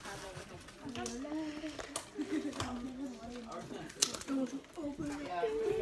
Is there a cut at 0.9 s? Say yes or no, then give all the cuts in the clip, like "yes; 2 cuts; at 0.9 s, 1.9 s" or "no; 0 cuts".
yes; 1 cut; at 0.9 s